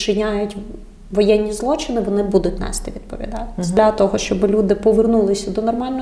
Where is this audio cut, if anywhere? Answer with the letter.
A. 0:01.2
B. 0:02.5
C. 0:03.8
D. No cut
C